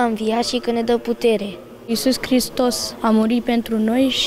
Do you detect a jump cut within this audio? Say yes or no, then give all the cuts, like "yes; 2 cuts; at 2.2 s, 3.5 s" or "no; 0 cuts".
yes; 1 cut; at 1.9 s